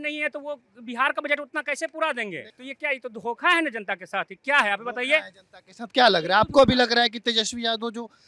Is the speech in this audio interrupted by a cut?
no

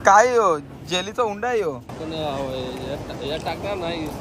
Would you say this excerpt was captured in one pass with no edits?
no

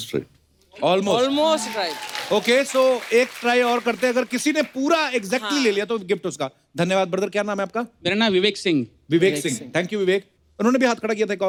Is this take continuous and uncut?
yes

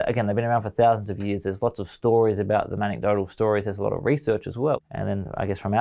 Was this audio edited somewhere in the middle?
yes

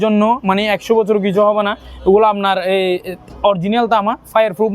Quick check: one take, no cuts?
yes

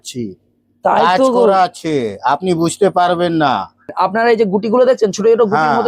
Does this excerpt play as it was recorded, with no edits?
no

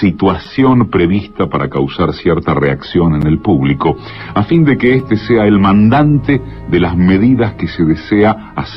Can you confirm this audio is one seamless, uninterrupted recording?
yes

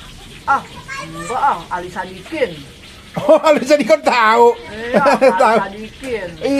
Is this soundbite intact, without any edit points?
yes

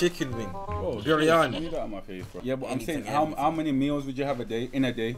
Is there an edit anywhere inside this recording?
yes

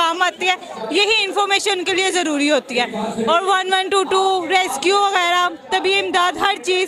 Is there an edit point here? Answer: no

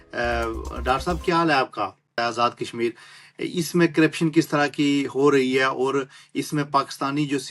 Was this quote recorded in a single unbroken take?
no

